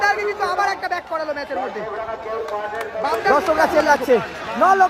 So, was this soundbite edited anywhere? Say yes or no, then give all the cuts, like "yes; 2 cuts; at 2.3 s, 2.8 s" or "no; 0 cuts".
yes; 1 cut; at 3.3 s